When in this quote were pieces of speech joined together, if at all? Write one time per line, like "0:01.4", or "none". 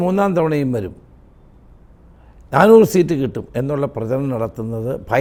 none